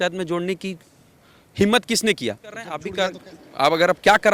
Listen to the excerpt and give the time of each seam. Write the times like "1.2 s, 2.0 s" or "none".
2.8 s